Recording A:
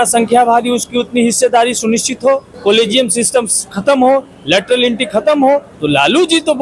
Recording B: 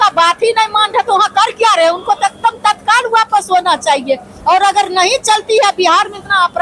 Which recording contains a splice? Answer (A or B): A